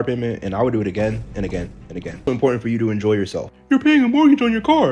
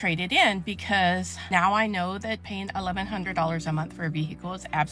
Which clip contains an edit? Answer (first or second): first